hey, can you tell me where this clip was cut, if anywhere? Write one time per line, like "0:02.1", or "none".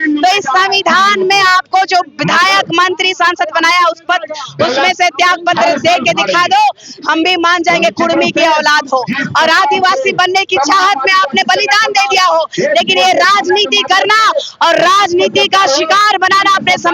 none